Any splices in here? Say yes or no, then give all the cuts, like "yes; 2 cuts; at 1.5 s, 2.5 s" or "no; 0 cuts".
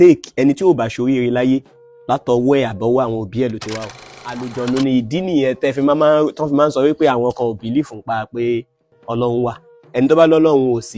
yes; 1 cut; at 4.4 s